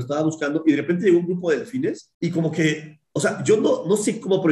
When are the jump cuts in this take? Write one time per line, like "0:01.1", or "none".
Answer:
0:02.1